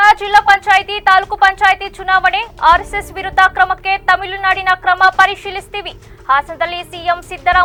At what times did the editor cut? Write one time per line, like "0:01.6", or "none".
none